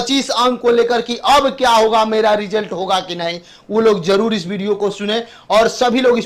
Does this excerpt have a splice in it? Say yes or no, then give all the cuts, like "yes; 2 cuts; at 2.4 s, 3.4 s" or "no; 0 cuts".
no; 0 cuts